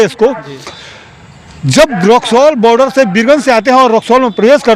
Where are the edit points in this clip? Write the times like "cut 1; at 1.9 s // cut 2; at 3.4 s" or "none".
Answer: none